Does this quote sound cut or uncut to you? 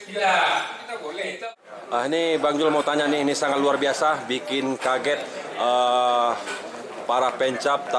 cut